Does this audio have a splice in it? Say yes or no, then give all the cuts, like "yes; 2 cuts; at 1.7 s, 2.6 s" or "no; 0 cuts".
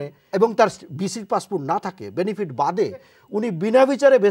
yes; 1 cut; at 3.2 s